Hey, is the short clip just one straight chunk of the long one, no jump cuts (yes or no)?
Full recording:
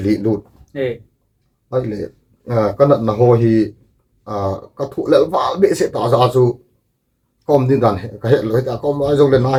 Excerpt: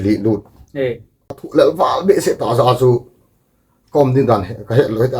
no